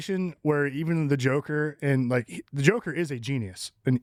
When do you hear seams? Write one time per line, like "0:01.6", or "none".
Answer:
none